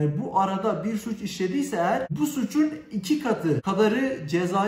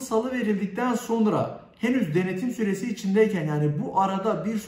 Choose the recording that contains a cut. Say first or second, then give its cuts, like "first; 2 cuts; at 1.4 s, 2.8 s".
first; 2 cuts; at 2.1 s, 3.6 s